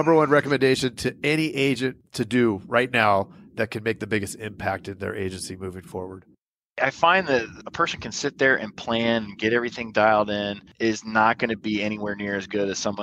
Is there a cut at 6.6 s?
yes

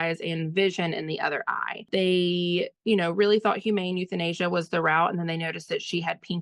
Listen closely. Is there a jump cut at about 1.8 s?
yes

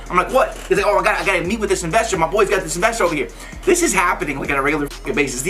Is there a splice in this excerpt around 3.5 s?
yes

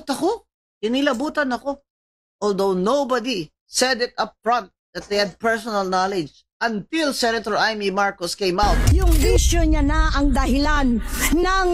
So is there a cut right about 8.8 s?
yes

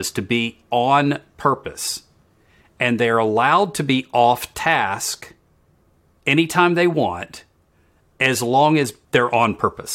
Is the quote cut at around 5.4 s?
no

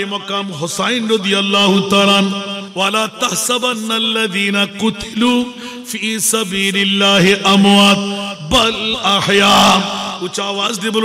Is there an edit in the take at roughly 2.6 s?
yes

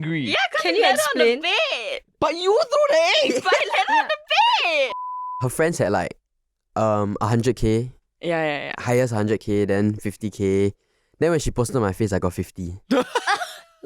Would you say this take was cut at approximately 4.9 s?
yes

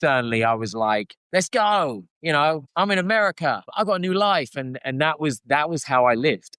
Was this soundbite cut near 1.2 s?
yes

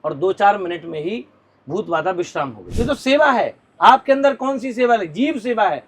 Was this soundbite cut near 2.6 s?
yes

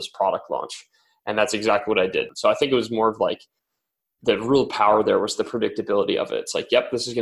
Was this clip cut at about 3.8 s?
no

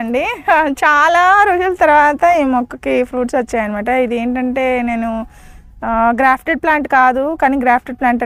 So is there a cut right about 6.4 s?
no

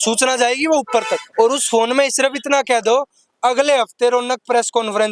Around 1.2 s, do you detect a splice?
yes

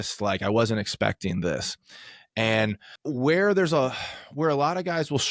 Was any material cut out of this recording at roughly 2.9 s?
yes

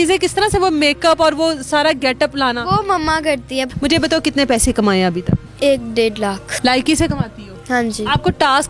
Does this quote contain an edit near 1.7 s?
no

